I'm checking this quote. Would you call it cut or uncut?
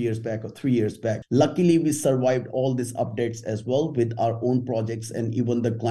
cut